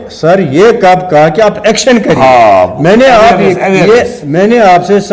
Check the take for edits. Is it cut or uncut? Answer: uncut